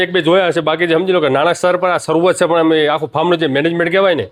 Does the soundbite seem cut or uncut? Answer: uncut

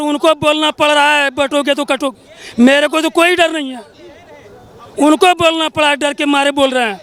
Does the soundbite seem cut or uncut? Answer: uncut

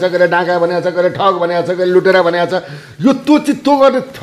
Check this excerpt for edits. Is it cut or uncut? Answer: uncut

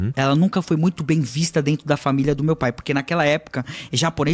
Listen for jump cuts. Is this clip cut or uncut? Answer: uncut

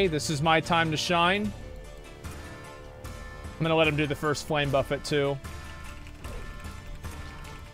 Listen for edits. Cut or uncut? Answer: uncut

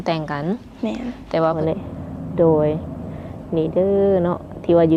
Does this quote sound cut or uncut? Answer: cut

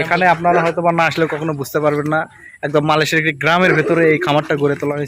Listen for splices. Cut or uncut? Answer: uncut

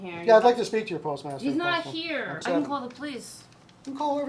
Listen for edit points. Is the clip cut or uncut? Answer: cut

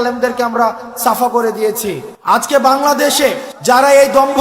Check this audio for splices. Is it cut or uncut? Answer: cut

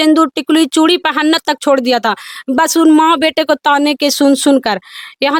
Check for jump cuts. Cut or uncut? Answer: uncut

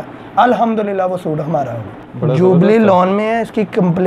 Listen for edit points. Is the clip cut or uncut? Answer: cut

